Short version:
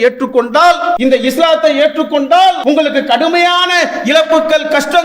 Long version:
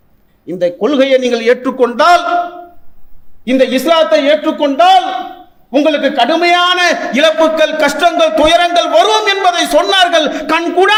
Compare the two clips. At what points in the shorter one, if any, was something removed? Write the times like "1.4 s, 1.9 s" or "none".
1.0 s, 2.6 s